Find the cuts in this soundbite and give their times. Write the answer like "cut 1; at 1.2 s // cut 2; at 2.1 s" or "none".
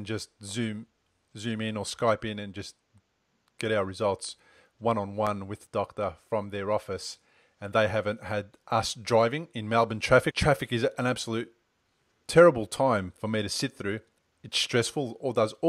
cut 1; at 10.3 s